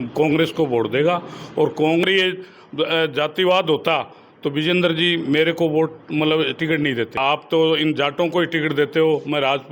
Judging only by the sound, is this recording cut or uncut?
cut